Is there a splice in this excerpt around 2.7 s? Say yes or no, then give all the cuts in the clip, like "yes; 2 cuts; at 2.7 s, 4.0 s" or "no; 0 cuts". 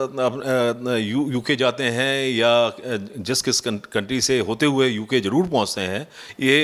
no; 0 cuts